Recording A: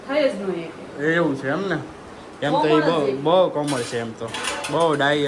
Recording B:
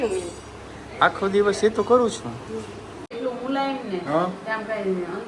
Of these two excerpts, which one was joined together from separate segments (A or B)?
B